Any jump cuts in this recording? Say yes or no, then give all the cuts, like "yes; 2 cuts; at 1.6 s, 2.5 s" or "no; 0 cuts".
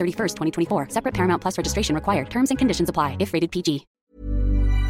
yes; 1 cut; at 3.9 s